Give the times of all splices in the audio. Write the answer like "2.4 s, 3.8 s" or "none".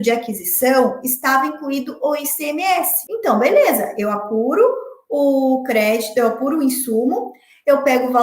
3.0 s

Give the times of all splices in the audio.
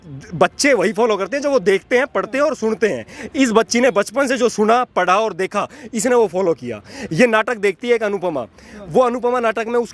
none

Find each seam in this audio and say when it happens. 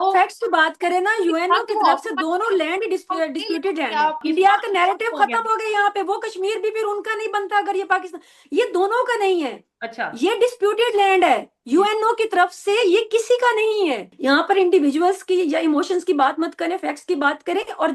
4.2 s, 14.1 s

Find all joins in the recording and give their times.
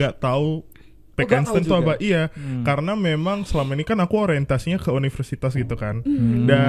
none

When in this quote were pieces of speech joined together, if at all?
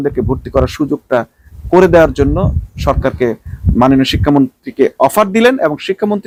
none

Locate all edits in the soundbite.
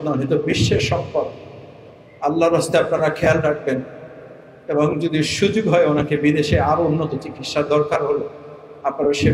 none

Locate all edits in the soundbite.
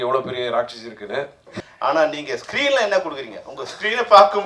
1.4 s

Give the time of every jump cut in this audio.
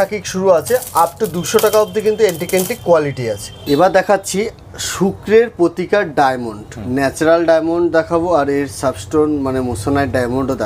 none

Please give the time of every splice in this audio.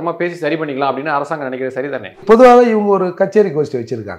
2.2 s

